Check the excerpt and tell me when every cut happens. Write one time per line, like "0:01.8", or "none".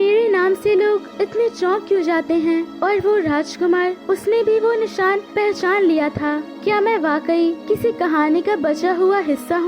0:01.1
0:02.7
0:04.0
0:05.3
0:06.5
0:07.6